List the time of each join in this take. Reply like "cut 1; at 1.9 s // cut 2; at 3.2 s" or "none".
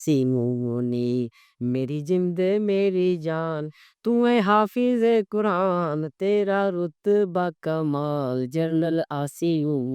none